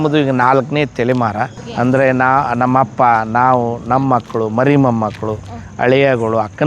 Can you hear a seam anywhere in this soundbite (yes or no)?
yes